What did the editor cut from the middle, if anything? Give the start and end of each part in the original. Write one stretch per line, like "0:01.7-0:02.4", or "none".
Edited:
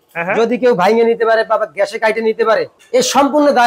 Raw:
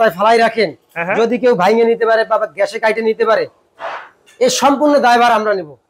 0:03.6-0:04.2